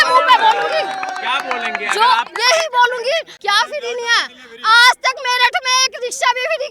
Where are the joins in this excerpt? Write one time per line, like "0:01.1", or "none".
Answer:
0:03.3

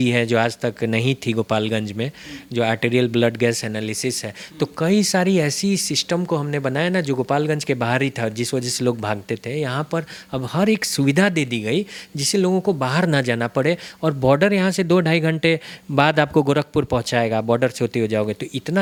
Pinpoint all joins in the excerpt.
none

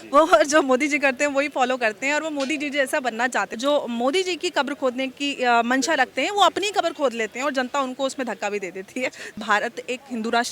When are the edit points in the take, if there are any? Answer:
0:03.5
0:09.4

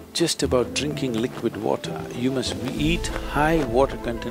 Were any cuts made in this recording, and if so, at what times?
none

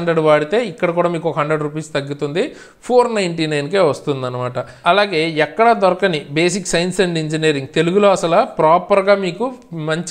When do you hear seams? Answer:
0:04.6

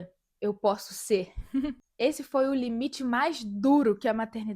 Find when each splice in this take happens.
0:01.8

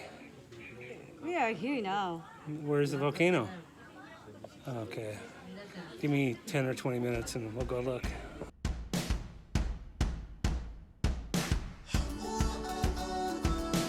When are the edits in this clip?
0:08.5

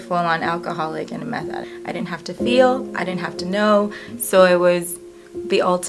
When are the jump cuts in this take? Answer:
0:01.7
0:04.1

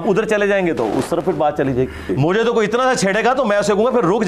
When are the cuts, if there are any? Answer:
0:02.1

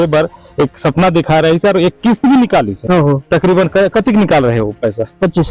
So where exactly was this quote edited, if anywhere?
none

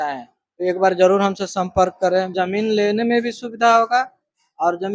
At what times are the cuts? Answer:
0:02.3

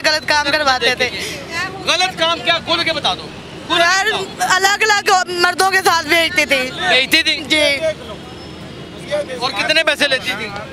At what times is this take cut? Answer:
none

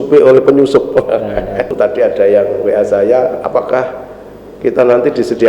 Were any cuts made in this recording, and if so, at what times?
0:01.7

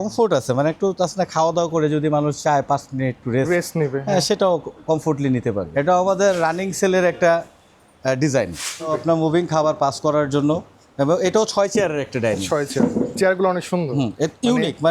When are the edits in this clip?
0:03.2
0:05.6
0:08.9

